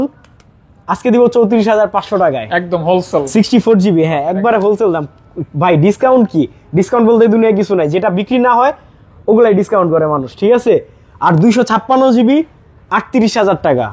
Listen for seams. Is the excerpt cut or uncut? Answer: uncut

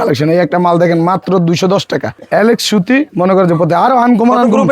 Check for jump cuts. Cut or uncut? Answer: cut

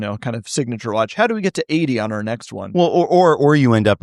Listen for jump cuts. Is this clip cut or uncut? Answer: uncut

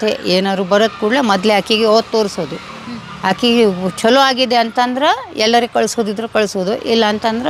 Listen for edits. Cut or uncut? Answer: uncut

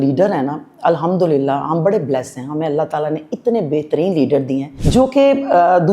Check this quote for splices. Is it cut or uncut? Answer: cut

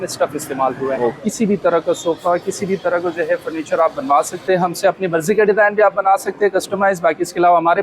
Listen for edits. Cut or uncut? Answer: cut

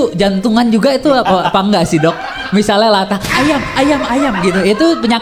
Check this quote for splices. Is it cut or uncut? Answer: uncut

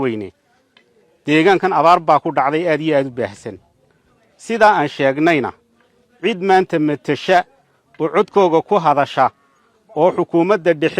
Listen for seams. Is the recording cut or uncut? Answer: uncut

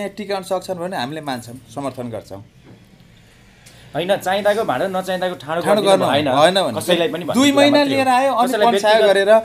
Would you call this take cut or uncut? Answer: uncut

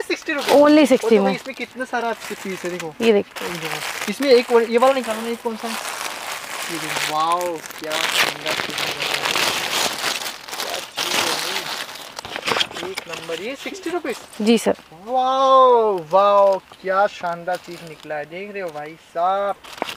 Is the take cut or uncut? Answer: uncut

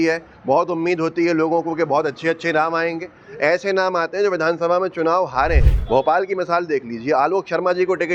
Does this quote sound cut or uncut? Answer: cut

